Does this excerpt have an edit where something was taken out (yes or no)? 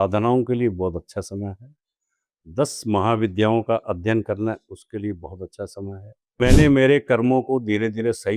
yes